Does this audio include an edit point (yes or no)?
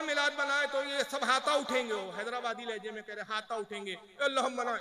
no